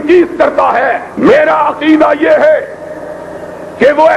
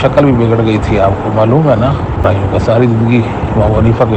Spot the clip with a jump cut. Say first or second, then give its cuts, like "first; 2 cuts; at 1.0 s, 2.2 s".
second; 1 cut; at 2.2 s